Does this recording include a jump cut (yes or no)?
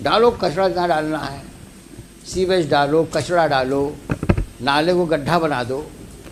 no